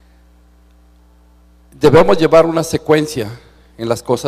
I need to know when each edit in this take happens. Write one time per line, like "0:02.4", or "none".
none